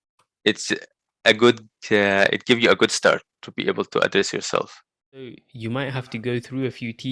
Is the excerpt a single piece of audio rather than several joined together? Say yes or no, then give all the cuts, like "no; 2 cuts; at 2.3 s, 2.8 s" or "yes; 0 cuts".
no; 1 cut; at 5.5 s